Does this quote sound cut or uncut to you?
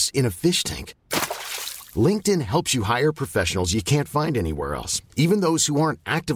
uncut